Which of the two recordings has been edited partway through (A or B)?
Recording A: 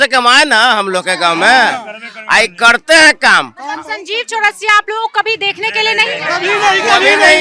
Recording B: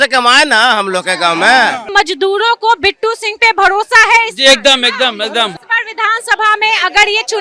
B